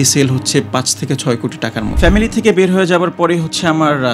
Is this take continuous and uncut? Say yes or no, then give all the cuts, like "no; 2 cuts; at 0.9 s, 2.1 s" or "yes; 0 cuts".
no; 1 cut; at 1.9 s